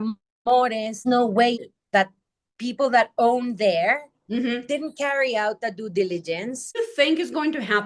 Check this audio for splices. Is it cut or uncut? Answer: cut